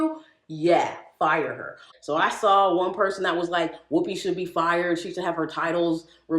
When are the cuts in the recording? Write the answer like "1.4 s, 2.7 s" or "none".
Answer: 1.9 s

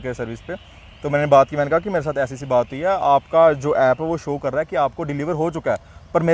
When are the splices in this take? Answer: none

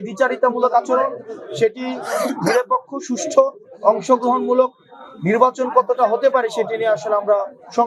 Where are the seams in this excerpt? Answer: none

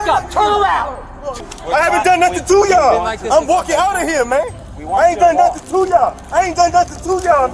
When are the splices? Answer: 1.4 s

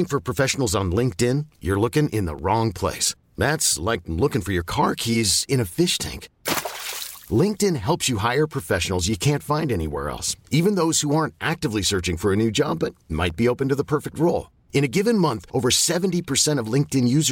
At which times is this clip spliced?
none

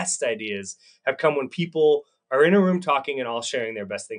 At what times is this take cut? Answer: none

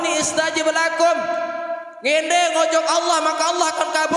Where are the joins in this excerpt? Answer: none

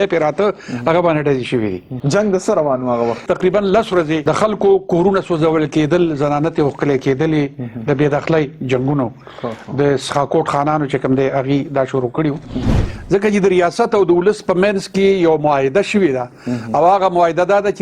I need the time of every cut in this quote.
1.9 s, 3.2 s, 4.2 s, 12.8 s

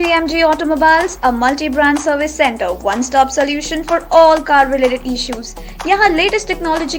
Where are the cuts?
none

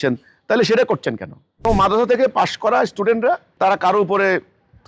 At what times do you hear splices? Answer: 1.6 s, 3.5 s

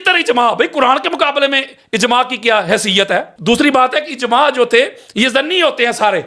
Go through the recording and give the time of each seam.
3.3 s

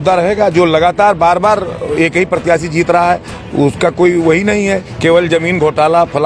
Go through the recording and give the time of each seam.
none

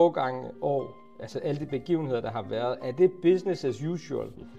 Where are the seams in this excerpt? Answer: none

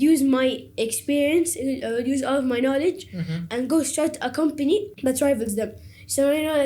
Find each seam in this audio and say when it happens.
4.9 s

